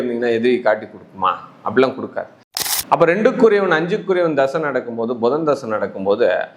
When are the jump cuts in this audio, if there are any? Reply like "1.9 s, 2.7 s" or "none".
2.5 s